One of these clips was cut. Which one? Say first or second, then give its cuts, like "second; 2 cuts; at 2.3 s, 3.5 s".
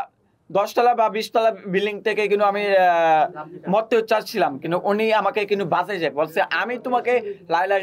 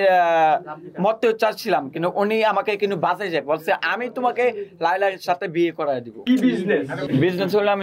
second; 2 cuts; at 6.2 s, 7.1 s